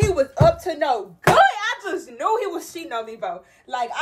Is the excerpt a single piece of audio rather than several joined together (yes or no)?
yes